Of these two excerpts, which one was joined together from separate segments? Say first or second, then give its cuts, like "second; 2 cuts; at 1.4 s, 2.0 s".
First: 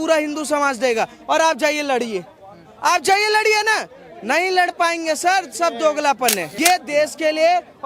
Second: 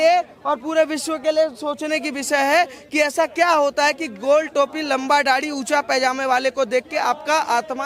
first; 1 cut; at 6.5 s